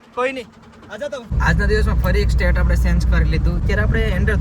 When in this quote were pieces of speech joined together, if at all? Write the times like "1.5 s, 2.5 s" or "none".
1.3 s, 3.6 s